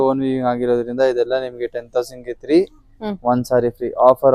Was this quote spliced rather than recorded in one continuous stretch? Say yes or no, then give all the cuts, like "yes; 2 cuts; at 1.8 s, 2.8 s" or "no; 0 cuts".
no; 0 cuts